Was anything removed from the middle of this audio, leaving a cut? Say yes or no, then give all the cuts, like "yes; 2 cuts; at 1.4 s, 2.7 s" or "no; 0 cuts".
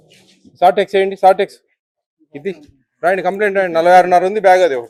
no; 0 cuts